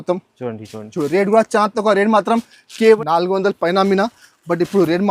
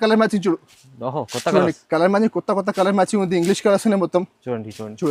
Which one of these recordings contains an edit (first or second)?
first